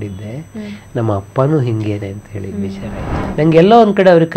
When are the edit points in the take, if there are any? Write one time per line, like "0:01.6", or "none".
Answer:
0:03.2